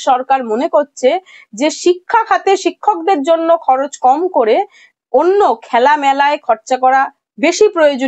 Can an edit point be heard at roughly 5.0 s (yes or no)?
no